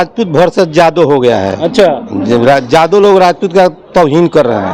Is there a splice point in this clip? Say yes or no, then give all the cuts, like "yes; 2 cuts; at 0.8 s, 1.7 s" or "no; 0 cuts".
no; 0 cuts